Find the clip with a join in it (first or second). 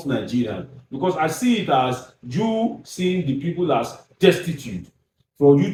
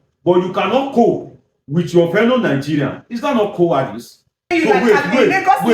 second